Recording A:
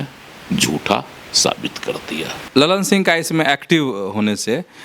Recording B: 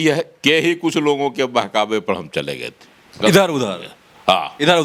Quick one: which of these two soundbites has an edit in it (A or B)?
A